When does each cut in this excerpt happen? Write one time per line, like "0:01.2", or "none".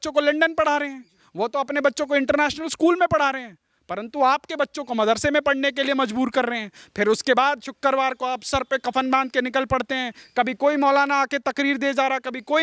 none